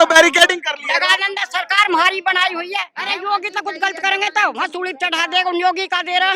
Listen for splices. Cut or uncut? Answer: cut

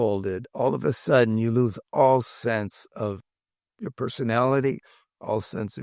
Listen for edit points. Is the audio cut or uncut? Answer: uncut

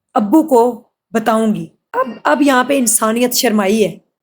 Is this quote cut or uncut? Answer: cut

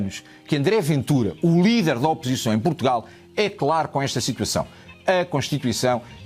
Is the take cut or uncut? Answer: uncut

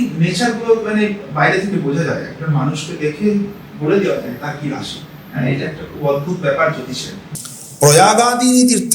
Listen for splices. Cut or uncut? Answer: cut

